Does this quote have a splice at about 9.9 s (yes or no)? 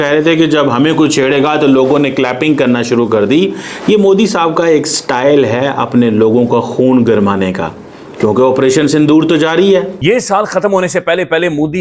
yes